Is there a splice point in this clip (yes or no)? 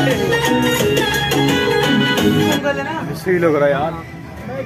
no